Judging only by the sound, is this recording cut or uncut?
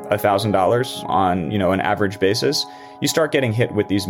cut